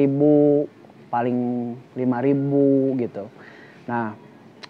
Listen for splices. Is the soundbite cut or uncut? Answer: uncut